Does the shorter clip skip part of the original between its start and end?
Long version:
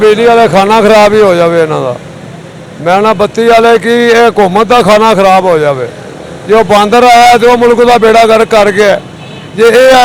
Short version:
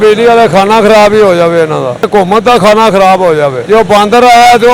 yes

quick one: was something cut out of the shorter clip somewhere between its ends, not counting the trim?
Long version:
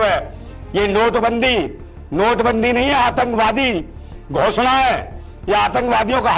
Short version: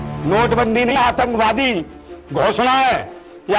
yes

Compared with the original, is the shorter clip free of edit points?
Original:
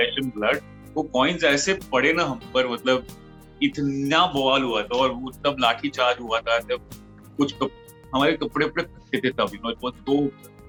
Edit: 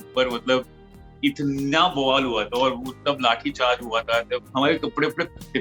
no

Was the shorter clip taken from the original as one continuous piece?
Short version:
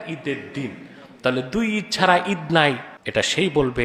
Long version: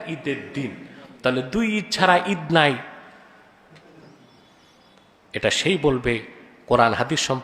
no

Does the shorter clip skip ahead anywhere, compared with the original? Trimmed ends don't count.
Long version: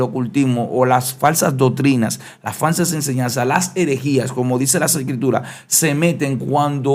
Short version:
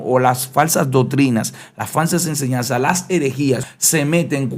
yes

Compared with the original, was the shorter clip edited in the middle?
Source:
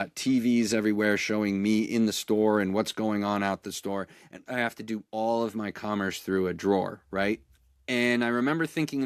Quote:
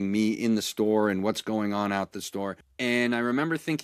yes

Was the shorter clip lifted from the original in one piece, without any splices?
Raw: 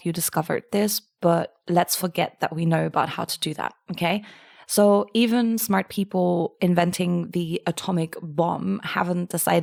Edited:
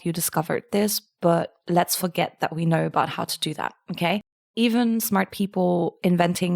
no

